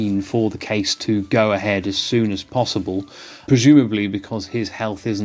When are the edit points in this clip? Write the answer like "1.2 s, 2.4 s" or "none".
3.4 s

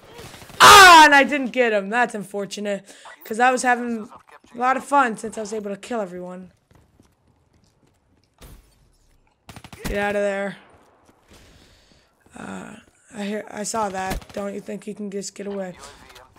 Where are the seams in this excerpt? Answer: none

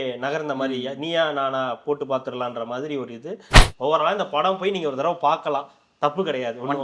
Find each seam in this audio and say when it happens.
3.5 s

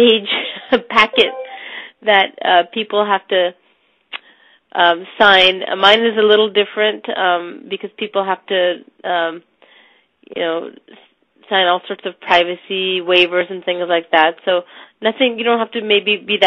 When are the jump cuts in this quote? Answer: none

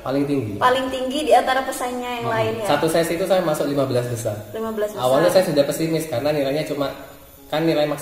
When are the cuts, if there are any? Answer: none

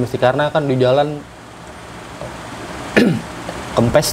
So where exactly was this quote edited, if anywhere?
none

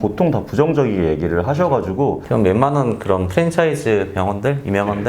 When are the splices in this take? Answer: 2.2 s

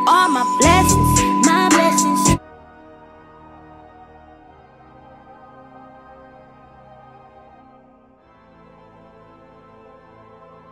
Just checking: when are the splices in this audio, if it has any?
none

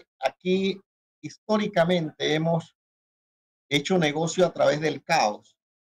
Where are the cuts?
none

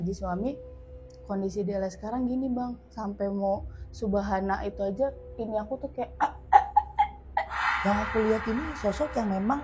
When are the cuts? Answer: 7.6 s

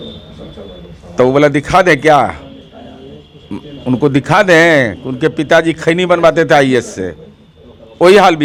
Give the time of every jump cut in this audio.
none

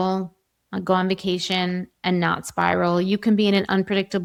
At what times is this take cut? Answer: none

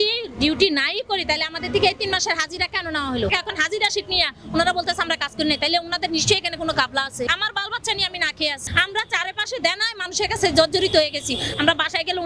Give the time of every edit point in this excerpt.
3.3 s, 7.3 s, 8.6 s

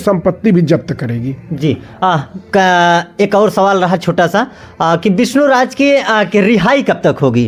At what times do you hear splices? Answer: none

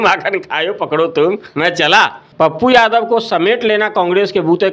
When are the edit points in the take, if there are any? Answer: 2.2 s

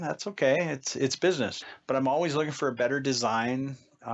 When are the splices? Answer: 1.5 s

